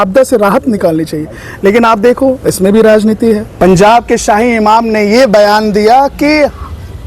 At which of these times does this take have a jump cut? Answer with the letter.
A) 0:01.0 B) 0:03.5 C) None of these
B